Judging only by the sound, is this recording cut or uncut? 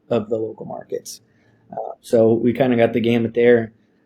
uncut